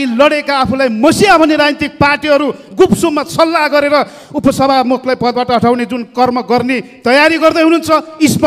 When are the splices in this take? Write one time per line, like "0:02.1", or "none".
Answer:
none